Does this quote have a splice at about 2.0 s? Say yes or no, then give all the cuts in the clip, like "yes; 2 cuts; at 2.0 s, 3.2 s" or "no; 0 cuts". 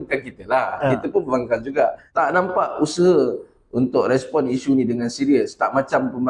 yes; 1 cut; at 2.0 s